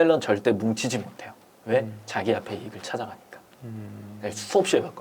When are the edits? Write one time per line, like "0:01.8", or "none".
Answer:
none